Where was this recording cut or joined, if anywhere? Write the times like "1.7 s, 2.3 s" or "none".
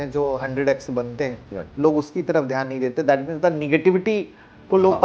none